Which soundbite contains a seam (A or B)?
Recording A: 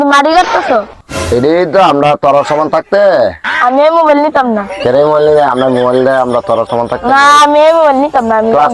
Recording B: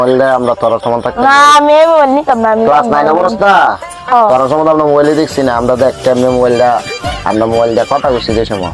A